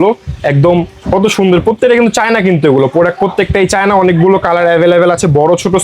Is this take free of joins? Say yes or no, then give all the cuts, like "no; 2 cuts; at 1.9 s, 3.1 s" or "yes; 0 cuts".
yes; 0 cuts